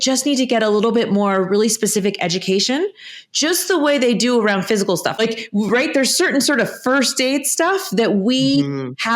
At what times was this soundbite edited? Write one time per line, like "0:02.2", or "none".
0:05.1